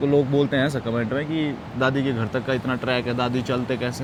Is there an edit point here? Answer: no; 0 cuts

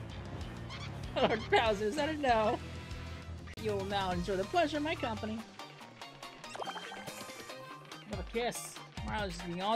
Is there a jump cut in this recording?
yes; 1 cut; at 3.6 s

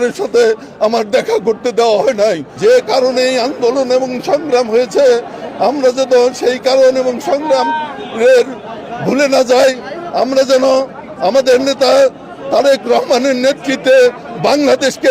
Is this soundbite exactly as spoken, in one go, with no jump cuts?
no; 1 cut; at 2.5 s

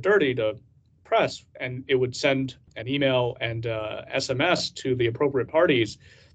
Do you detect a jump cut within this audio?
no; 0 cuts

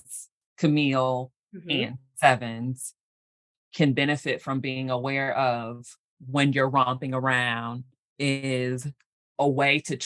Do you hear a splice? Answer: yes; 1 cut; at 9.0 s

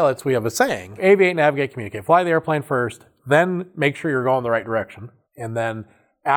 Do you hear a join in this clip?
yes; 1 cut; at 1.0 s

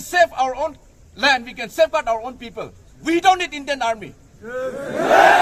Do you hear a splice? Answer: no; 0 cuts

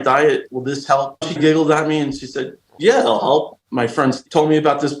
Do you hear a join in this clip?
yes; 2 cuts; at 1.2 s, 4.1 s

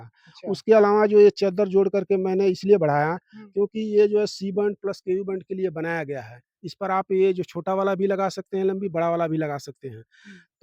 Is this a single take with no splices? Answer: yes; 0 cuts

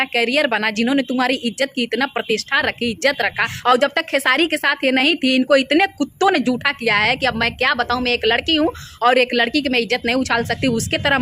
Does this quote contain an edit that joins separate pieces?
yes; 1 cut; at 3.5 s

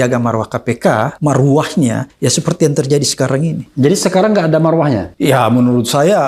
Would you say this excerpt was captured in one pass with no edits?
no; 4 cuts; at 1.1 s, 2.1 s, 3.7 s, 5.1 s

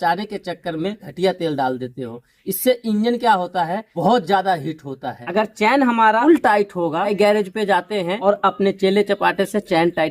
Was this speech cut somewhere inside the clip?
yes; 2 cuts; at 1.1 s, 5.2 s

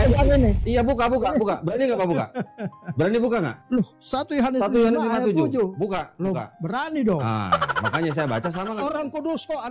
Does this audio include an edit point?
no; 0 cuts

